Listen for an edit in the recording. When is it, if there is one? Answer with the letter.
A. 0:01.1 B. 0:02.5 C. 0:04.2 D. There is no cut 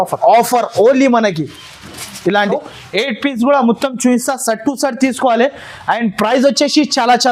B